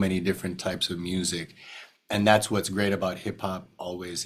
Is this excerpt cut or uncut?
uncut